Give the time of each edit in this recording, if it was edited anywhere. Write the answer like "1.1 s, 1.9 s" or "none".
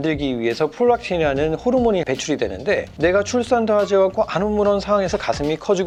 none